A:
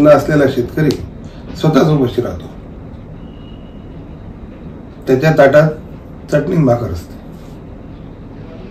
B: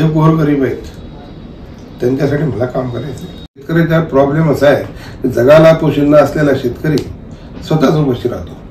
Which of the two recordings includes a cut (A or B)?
B